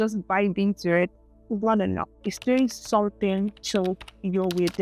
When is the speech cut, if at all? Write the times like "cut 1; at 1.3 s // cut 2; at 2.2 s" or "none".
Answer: none